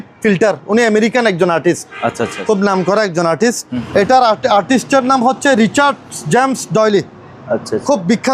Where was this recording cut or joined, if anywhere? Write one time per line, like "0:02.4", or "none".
0:03.7